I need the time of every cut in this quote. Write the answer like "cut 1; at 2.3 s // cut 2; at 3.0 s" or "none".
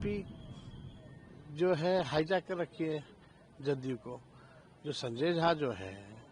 none